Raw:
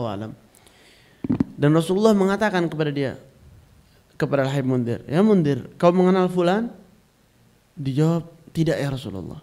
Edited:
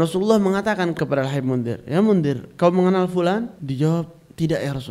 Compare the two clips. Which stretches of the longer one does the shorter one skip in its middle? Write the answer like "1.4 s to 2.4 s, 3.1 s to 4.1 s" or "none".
2.7 s to 4.2 s, 6.8 s to 7.8 s